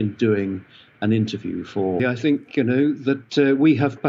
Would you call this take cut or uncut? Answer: cut